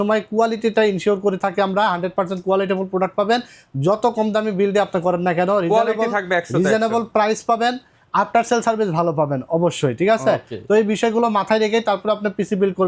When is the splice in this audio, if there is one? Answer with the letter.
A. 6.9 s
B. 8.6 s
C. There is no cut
C